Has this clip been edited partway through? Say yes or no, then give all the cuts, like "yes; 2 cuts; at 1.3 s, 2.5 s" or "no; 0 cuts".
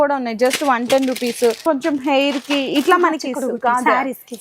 yes; 1 cut; at 1.6 s